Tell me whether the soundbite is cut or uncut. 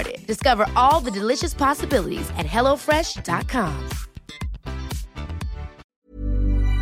cut